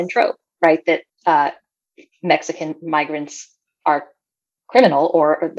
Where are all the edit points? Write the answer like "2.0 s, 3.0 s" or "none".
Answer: 1.1 s